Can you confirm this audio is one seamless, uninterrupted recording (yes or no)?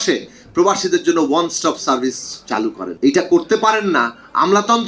no